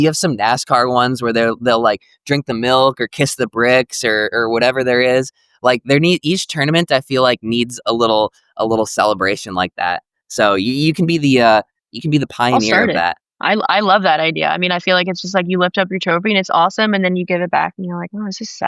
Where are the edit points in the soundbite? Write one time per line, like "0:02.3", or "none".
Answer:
none